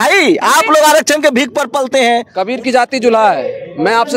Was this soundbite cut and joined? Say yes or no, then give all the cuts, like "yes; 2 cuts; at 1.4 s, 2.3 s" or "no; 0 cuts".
yes; 1 cut; at 2.3 s